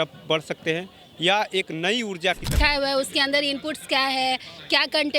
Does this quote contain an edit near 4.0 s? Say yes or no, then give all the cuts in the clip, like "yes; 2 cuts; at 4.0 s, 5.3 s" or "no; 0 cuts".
no; 1 cut; at 2.6 s